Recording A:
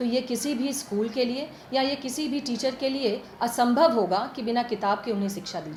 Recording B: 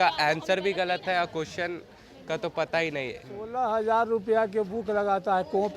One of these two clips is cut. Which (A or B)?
B